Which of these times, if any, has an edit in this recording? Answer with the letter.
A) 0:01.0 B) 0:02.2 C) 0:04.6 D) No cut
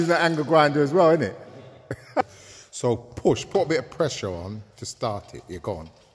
B